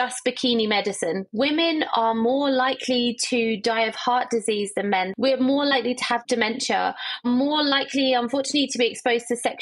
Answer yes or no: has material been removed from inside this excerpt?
yes